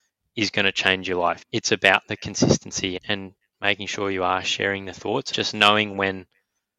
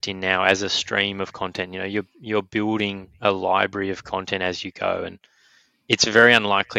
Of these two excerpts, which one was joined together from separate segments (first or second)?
first